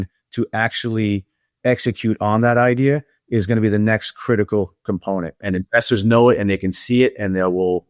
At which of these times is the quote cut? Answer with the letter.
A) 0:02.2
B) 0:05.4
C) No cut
B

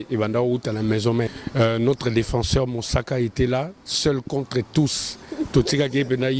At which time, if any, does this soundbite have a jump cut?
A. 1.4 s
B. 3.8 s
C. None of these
A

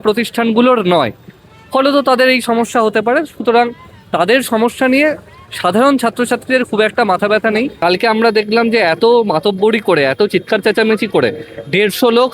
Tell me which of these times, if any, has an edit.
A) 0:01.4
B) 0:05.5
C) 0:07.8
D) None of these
C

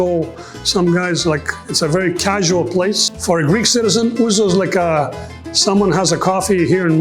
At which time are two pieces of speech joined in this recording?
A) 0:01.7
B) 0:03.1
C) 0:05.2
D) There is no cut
B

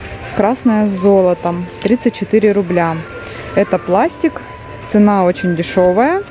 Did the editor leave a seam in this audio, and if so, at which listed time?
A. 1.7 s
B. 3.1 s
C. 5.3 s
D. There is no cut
D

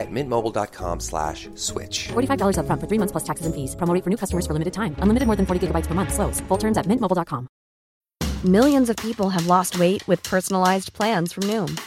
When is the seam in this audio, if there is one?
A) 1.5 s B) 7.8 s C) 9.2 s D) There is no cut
B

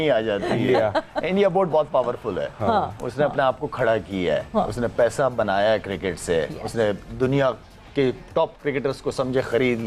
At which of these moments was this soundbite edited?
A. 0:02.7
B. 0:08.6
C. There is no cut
C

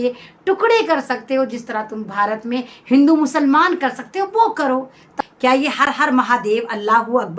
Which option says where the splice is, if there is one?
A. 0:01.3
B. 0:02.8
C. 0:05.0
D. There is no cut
C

